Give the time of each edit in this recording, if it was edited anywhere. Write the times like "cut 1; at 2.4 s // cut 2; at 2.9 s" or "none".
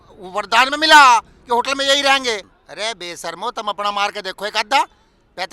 cut 1; at 2.6 s